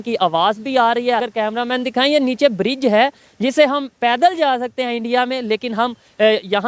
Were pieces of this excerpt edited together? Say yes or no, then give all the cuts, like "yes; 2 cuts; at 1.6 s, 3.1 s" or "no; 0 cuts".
yes; 1 cut; at 1.3 s